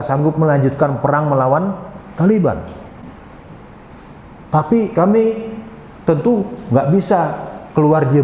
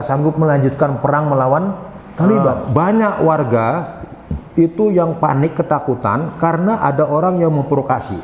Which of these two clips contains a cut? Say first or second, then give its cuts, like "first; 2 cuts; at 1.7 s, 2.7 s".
second; 1 cut; at 2.6 s